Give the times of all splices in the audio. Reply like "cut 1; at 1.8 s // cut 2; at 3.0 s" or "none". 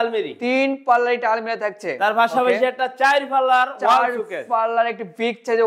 none